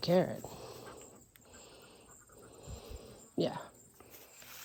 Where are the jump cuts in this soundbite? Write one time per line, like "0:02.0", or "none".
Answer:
none